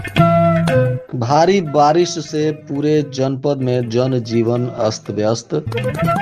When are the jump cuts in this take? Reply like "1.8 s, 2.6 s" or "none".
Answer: 1.0 s